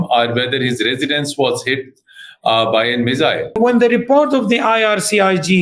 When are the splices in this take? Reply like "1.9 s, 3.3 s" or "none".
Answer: 3.6 s